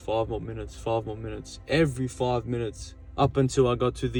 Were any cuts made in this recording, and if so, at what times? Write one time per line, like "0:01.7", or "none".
none